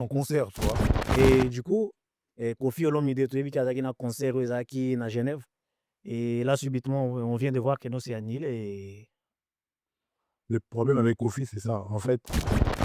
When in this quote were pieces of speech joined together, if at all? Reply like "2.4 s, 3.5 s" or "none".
0.9 s